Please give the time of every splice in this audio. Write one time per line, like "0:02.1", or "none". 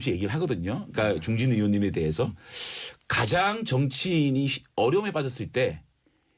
0:02.4